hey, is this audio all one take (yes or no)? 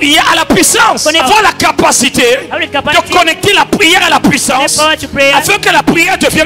yes